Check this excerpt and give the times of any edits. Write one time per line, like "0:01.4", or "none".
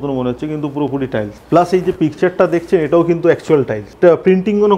0:01.4
0:03.9